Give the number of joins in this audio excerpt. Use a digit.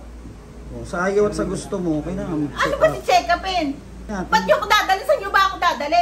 1